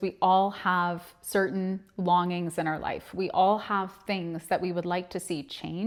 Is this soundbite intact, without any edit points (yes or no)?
yes